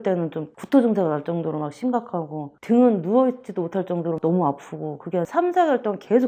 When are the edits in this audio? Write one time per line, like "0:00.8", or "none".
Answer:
0:05.1